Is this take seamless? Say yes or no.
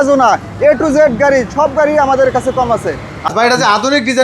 no